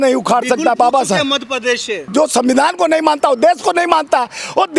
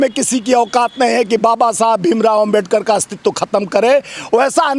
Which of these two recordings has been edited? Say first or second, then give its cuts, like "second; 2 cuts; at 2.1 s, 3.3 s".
first; 1 cut; at 2.1 s